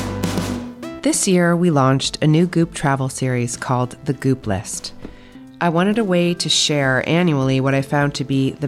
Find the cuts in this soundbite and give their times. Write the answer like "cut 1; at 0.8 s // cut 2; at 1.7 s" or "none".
cut 1; at 0.9 s